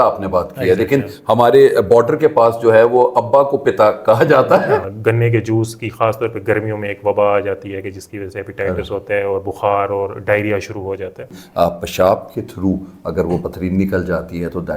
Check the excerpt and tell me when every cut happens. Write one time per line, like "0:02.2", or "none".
0:04.9
0:11.4